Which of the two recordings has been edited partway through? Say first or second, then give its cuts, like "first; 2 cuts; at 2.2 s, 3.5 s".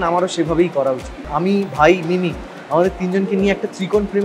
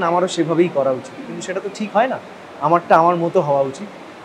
first; 1 cut; at 1.2 s